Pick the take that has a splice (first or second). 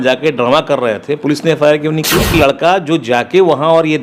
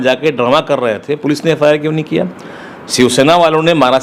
first